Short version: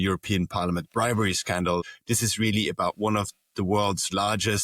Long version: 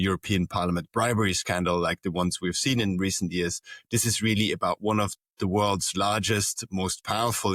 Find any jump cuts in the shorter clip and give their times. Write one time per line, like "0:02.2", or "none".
0:01.8